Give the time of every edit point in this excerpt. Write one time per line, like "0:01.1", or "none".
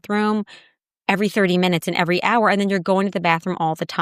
none